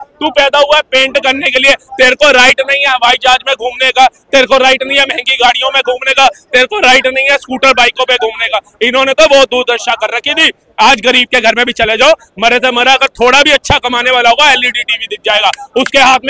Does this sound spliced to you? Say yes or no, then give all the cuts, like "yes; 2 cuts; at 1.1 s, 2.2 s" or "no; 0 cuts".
no; 0 cuts